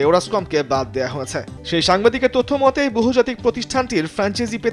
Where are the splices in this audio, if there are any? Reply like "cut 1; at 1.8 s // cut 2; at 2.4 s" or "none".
cut 1; at 1.6 s